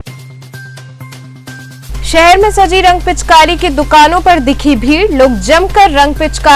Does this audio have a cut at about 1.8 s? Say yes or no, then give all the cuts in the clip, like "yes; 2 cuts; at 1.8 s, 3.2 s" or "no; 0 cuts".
yes; 1 cut; at 1.8 s